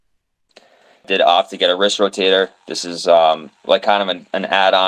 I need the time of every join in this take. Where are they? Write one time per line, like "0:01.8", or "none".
0:01.1